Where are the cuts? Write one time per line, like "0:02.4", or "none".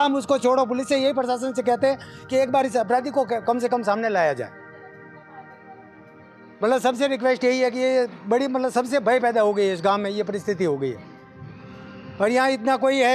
none